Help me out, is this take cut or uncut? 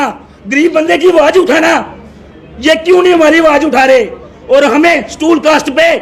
uncut